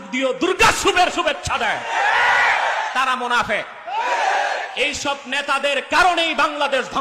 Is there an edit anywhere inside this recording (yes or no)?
no